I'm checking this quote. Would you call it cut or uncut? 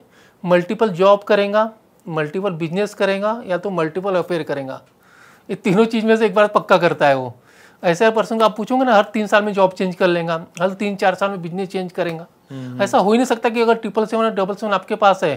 uncut